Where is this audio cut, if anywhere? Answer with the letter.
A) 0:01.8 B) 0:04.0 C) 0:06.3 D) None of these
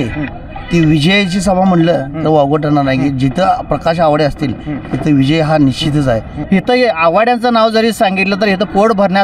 C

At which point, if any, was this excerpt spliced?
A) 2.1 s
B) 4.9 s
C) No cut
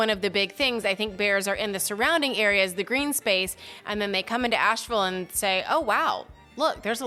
C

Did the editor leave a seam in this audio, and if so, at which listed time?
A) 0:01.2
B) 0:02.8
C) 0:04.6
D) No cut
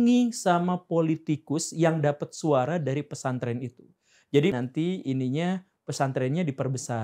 C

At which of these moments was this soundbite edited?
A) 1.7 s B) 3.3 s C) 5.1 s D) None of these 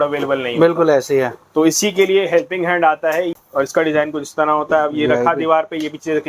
B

